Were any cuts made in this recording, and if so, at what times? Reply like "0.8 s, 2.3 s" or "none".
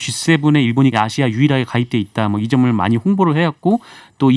0.9 s